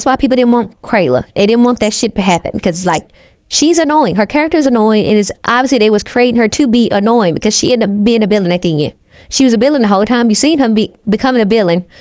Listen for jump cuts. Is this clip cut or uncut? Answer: uncut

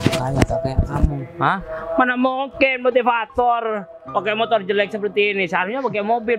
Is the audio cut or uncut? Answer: uncut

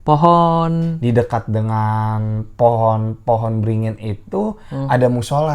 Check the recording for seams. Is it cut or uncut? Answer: cut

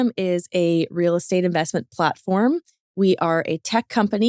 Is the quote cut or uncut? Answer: uncut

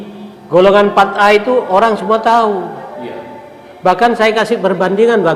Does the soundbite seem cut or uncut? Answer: uncut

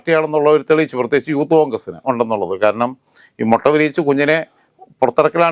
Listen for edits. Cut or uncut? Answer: uncut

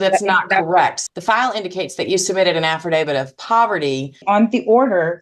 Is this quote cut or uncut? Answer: cut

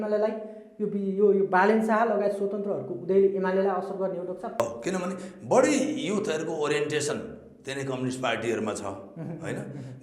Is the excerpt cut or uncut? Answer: cut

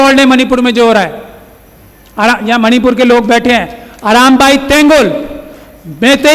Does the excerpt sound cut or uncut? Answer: uncut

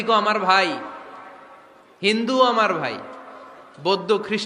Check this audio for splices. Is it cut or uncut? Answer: uncut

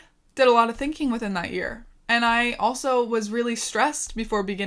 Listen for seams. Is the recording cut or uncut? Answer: uncut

